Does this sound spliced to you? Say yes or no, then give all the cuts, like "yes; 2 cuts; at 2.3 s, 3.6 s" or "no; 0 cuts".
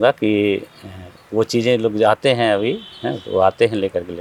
no; 0 cuts